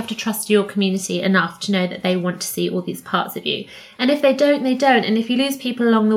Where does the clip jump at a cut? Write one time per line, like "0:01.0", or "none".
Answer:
none